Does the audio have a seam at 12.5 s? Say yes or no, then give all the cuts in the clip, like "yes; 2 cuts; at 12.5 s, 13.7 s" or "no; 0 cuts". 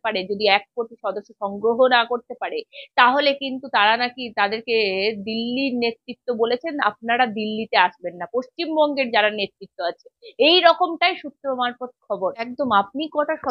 yes; 1 cut; at 12.5 s